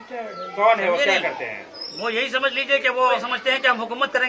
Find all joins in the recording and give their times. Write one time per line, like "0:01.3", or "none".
0:03.3